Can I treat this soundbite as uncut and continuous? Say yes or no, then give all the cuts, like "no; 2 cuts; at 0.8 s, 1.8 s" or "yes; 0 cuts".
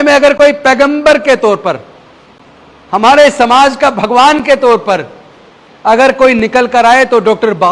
yes; 0 cuts